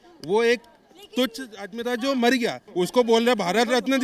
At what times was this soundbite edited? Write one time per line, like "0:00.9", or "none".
0:02.6